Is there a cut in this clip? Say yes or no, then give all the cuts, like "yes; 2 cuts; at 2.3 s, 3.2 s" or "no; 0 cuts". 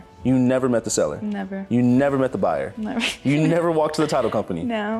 no; 0 cuts